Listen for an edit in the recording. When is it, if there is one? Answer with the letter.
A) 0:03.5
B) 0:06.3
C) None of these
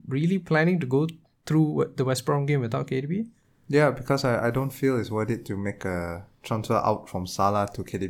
C